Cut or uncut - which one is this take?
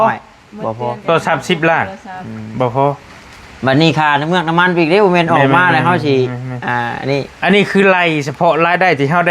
uncut